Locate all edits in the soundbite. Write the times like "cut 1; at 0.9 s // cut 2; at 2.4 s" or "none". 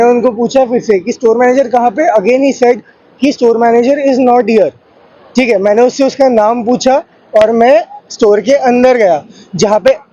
none

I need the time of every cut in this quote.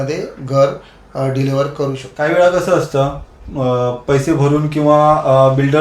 cut 1; at 2.0 s

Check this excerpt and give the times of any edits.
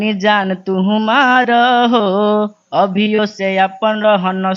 none

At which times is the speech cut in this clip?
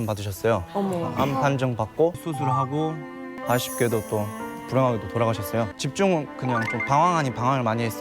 cut 1; at 2.2 s // cut 2; at 3.4 s // cut 3; at 5.8 s

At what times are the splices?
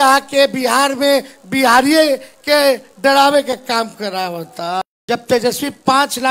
cut 1; at 4.9 s

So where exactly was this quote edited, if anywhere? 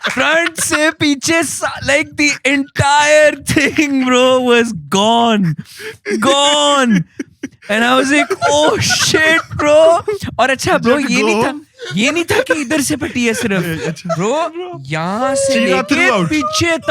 none

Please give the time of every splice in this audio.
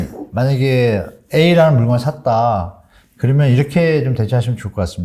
none

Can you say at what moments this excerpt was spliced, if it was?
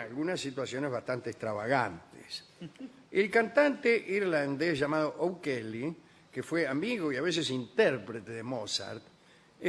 cut 1; at 4.5 s

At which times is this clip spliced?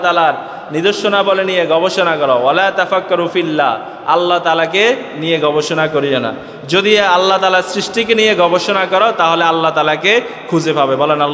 none

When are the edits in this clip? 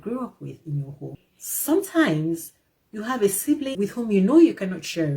cut 1; at 1.1 s // cut 2; at 3.7 s

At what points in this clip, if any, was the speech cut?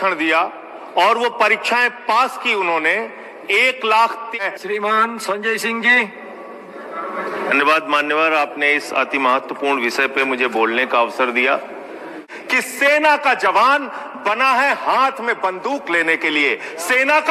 cut 1; at 4.3 s // cut 2; at 12.3 s

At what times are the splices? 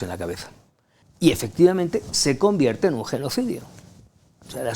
cut 1; at 1.0 s

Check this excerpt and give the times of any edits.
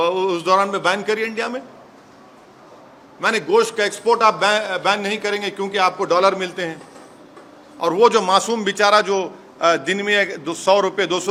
none

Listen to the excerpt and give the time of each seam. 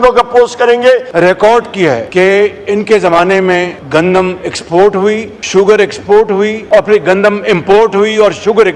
cut 1; at 1.1 s // cut 2; at 2.1 s // cut 3; at 3.8 s // cut 4; at 5.3 s // cut 5; at 6.6 s

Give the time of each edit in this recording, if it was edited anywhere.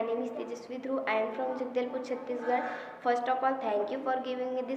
none

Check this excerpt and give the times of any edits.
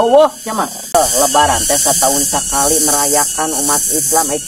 cut 1; at 0.9 s

